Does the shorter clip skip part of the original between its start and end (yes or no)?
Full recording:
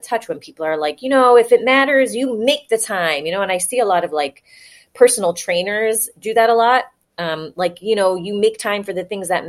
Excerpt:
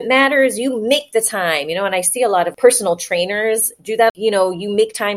yes